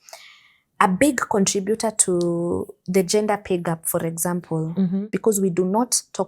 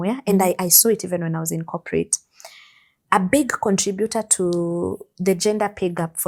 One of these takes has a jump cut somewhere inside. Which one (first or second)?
first